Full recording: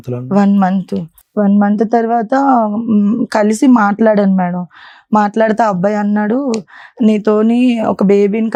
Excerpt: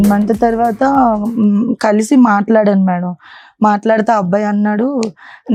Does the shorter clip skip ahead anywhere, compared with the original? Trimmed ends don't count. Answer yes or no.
no